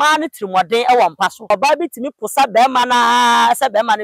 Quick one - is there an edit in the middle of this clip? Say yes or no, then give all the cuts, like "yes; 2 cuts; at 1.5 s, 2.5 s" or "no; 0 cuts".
yes; 1 cut; at 1.5 s